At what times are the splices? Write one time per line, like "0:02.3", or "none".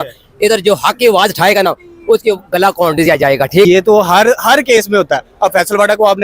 0:03.7